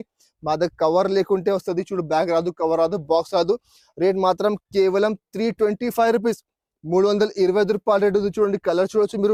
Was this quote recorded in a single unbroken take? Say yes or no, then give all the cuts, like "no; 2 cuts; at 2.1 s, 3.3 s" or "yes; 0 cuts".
yes; 0 cuts